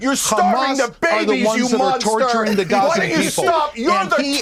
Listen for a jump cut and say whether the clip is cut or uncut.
uncut